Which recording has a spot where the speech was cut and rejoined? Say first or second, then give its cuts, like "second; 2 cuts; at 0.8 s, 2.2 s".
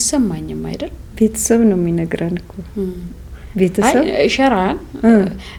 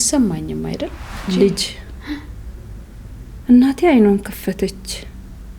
second; 1 cut; at 1.0 s